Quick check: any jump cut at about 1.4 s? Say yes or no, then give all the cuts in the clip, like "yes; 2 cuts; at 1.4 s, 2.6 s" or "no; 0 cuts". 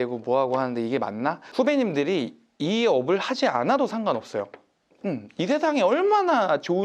yes; 1 cut; at 1.4 s